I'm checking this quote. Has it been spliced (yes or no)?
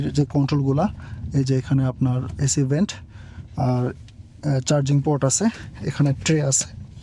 no